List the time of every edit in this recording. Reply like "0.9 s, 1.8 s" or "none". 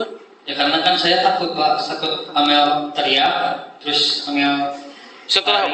none